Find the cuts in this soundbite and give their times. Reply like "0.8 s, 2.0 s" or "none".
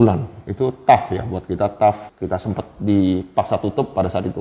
2.1 s